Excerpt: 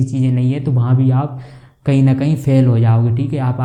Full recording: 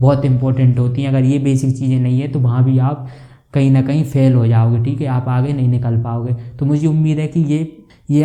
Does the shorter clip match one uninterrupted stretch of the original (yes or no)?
yes